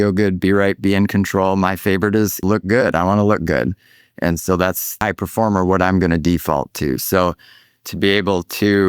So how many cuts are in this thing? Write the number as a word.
two